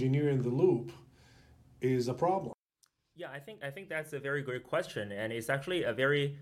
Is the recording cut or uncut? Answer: cut